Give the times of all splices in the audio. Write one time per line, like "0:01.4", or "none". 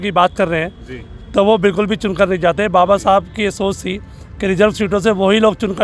none